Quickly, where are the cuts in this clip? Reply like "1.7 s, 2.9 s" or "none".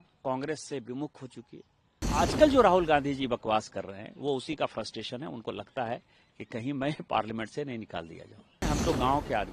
2.0 s, 8.6 s